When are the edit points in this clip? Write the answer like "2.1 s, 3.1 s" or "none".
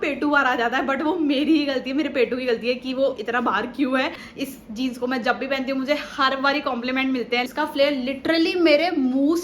4.2 s, 7.5 s